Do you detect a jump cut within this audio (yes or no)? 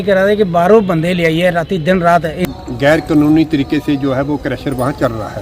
yes